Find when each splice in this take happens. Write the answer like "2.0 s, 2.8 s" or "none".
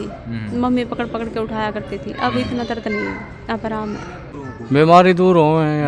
4.2 s